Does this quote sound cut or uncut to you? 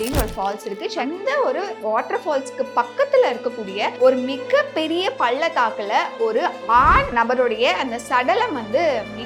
cut